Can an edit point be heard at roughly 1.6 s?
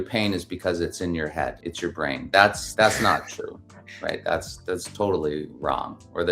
yes; 2 cuts; at 1.6 s, 2.6 s

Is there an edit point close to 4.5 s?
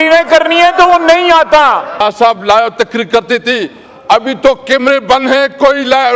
no; 1 cut; at 2.0 s

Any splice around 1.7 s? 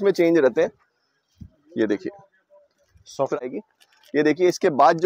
no; 1 cut; at 3.4 s

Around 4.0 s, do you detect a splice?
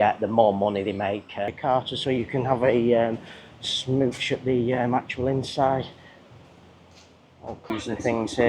no; 2 cuts; at 1.5 s, 7.7 s

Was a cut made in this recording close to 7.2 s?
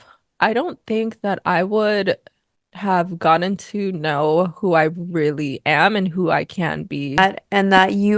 yes; 1 cut; at 7.2 s

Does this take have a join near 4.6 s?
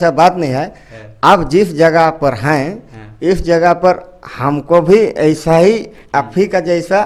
no; 0 cuts

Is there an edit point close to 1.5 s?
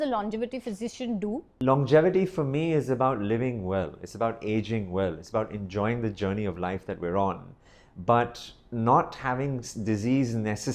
yes; 1 cut; at 1.5 s

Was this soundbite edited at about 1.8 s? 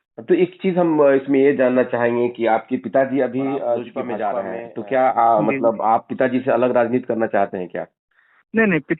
no; 1 cut; at 4.2 s

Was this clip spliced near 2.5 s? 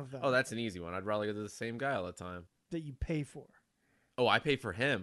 yes; 1 cut; at 2.5 s

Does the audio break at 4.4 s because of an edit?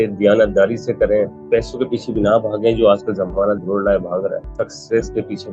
yes; 2 cuts; at 1.4 s, 4.4 s

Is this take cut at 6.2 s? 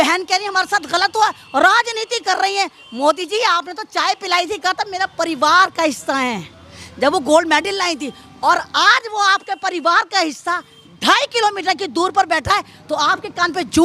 no; 0 cuts

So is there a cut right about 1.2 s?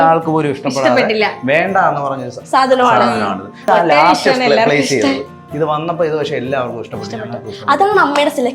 no; 1 cut; at 3.7 s

